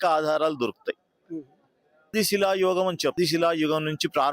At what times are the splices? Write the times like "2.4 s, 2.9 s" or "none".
2.1 s, 3.1 s